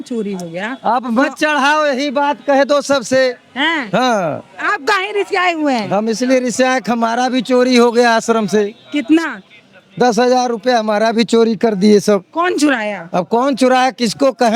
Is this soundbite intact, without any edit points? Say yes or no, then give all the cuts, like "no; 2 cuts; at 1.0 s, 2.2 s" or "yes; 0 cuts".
yes; 0 cuts